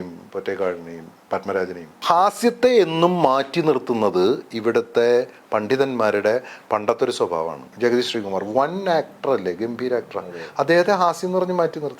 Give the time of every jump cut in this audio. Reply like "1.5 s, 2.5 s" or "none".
2.0 s, 7.6 s